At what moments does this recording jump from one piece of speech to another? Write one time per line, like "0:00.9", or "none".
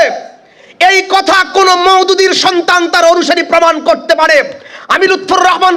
none